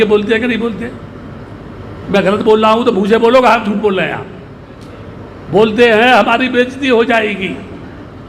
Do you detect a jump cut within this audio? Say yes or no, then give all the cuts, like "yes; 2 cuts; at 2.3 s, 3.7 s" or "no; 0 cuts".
no; 0 cuts